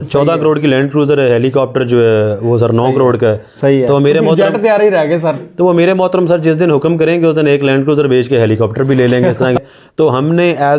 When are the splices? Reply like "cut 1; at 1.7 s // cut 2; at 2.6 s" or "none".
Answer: cut 1; at 9.6 s